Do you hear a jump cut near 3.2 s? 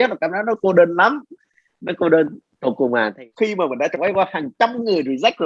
yes; 1 cut; at 3.2 s

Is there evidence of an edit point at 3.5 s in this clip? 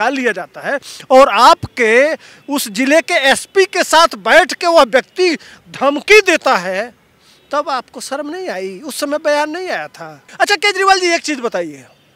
no; 1 cut; at 10.2 s

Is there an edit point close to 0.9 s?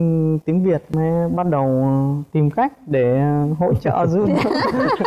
yes; 1 cut; at 0.9 s

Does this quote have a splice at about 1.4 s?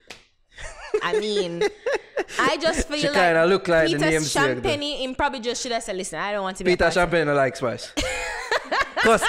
no; 0 cuts

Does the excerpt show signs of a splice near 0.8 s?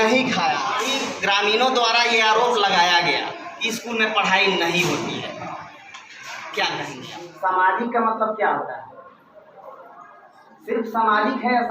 yes; 3 cuts; at 0.8 s, 7.3 s, 10.4 s

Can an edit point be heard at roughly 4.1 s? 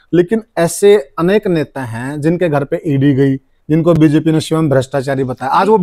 no; 0 cuts

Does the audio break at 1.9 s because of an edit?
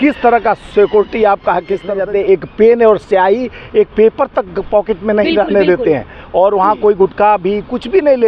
yes; 1 cut; at 1.9 s

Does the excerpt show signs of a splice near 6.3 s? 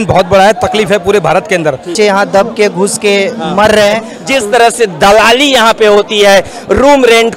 no; 2 cuts; at 1.9 s, 4.2 s

